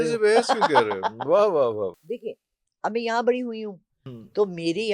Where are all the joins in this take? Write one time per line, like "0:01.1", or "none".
0:02.0